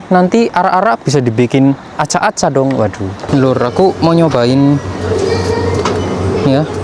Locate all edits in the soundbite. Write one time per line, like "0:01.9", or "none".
0:03.2